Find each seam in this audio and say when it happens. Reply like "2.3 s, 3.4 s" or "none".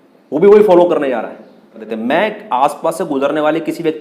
1.8 s